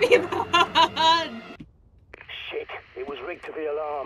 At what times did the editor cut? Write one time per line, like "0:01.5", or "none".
0:01.5